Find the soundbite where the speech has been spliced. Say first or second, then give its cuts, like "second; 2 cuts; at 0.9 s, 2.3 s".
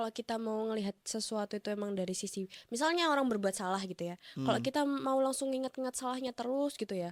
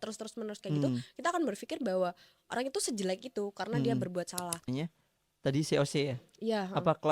second; 1 cut; at 4.7 s